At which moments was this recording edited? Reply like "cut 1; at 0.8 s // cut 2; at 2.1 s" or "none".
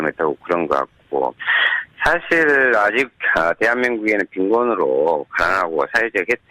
cut 1; at 2.9 s

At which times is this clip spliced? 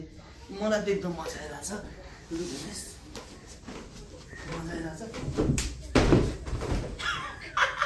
none

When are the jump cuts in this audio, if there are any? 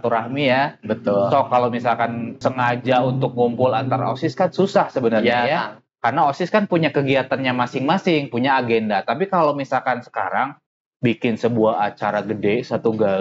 cut 1; at 2.4 s

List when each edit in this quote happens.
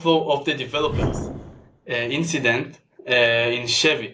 cut 1; at 1.5 s

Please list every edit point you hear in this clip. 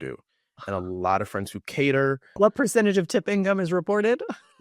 cut 1; at 2.3 s

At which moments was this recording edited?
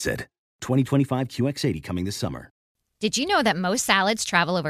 cut 1; at 2.7 s

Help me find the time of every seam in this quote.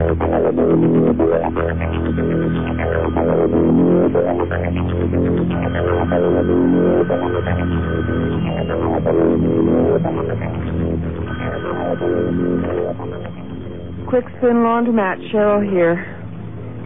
cut 1; at 11.1 s

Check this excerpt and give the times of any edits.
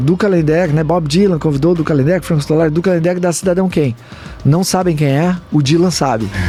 none

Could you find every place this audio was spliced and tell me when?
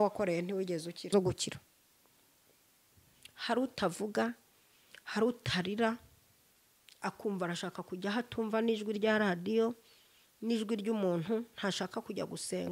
cut 1; at 1.1 s

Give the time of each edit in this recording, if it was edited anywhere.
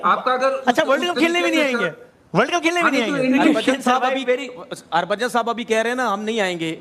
cut 1; at 3.6 s

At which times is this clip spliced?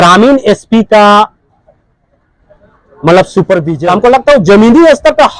cut 1; at 3.7 s

